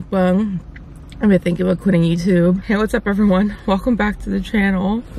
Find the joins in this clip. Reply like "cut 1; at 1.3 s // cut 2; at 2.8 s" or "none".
cut 1; at 2.6 s